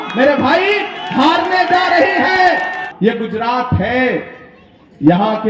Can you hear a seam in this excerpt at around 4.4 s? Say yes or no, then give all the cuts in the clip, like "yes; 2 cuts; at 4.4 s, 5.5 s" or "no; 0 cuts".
no; 1 cut; at 2.8 s